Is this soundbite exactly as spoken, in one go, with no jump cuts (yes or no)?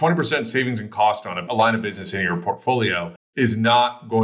no